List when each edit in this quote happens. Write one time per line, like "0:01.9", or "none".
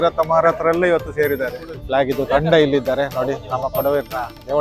0:01.7